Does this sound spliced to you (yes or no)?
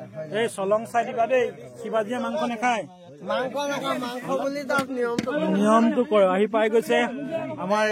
no